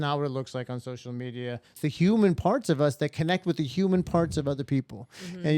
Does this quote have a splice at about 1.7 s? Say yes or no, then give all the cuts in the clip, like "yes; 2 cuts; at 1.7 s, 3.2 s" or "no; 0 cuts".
yes; 1 cut; at 1.7 s